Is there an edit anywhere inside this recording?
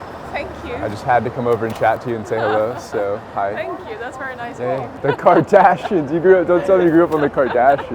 yes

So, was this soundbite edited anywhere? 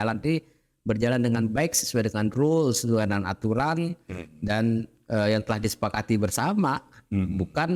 no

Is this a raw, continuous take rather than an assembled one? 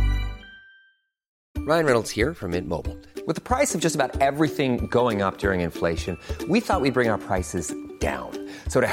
yes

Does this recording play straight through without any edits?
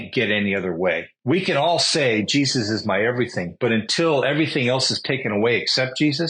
no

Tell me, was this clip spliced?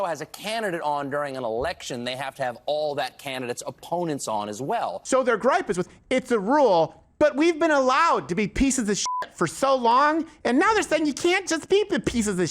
yes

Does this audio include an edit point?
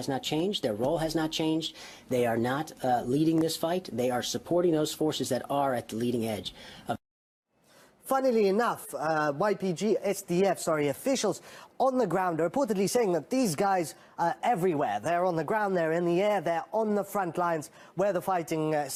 no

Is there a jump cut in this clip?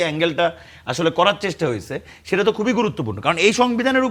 no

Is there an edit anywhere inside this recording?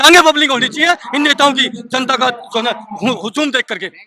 no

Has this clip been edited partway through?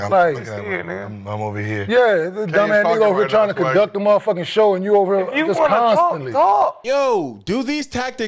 no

